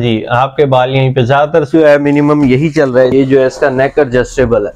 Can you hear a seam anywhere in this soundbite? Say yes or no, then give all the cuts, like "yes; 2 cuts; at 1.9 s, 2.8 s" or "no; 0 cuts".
yes; 1 cut; at 3.1 s